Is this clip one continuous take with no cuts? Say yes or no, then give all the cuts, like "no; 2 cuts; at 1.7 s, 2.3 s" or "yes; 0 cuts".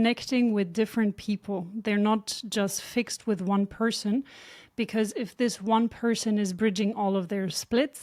yes; 0 cuts